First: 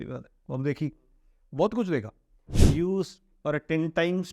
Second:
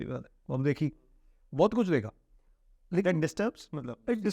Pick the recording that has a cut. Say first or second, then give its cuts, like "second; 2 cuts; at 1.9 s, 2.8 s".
first; 1 cut; at 2.6 s